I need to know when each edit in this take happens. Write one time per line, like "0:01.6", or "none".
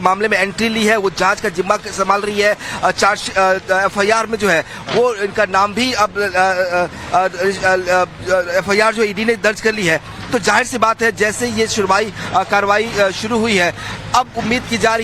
none